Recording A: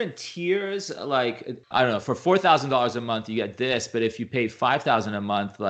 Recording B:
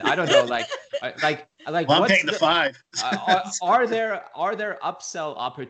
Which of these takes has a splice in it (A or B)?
A